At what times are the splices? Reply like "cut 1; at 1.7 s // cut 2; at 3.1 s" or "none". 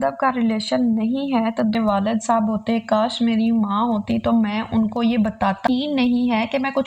cut 1; at 1.8 s // cut 2; at 5.7 s

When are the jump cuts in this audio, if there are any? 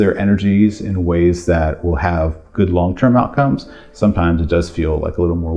none

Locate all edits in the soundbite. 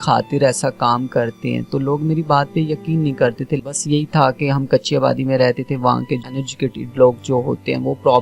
cut 1; at 3.6 s // cut 2; at 6.3 s

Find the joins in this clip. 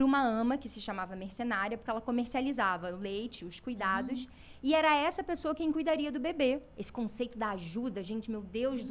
cut 1; at 6.8 s

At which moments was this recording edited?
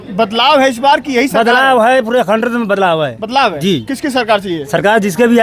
none

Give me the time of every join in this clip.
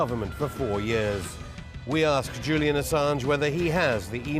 cut 1; at 2.9 s

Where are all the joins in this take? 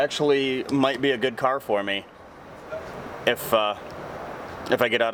none

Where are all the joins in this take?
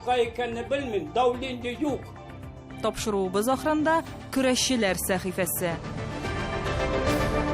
cut 1; at 5.8 s

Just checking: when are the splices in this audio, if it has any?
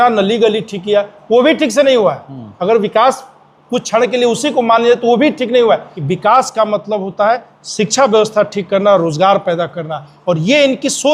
cut 1; at 5.9 s

